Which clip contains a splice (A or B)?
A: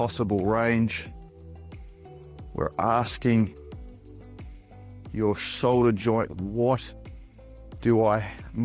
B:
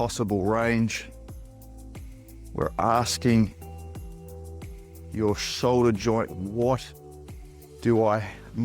A